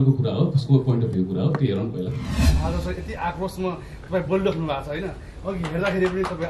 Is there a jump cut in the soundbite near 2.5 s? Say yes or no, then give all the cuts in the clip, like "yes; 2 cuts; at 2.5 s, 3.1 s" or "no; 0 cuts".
yes; 1 cut; at 2.5 s